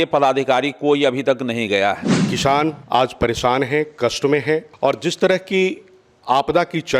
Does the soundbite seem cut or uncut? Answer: cut